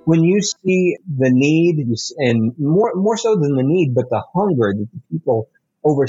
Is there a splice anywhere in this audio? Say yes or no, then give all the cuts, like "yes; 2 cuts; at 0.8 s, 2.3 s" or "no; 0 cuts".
yes; 1 cut; at 1.0 s